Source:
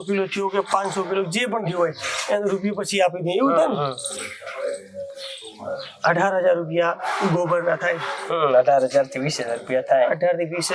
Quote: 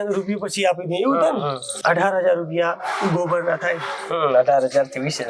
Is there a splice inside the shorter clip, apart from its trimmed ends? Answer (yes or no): yes